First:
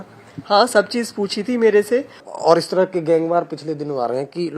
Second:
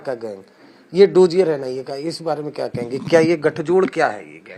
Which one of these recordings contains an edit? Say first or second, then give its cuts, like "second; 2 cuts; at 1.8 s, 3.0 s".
first; 1 cut; at 2.3 s